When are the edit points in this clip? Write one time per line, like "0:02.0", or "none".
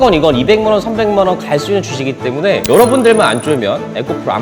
none